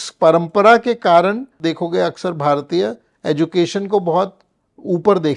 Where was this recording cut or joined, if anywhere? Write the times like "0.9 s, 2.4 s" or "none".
1.5 s

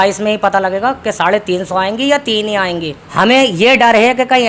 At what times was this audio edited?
3.0 s

